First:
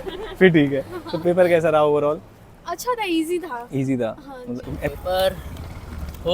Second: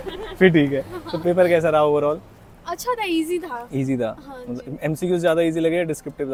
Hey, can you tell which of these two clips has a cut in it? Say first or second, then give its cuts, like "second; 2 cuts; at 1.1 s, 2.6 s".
first; 1 cut; at 4.9 s